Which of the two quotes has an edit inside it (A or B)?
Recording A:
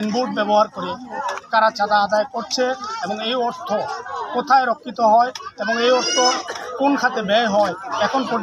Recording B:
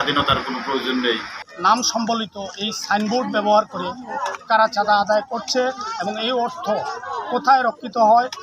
B